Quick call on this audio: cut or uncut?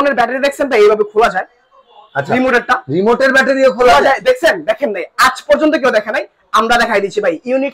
uncut